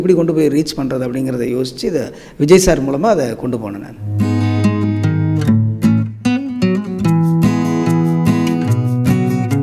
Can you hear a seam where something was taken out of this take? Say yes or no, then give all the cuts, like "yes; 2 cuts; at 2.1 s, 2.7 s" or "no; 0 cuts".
no; 0 cuts